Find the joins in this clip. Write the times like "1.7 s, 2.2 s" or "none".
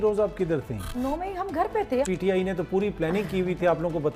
0.9 s, 2.1 s